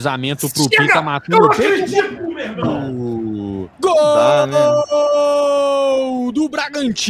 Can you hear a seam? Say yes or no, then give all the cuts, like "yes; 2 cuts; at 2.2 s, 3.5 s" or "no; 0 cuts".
no; 0 cuts